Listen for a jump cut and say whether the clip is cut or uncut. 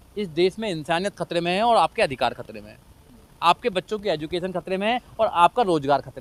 uncut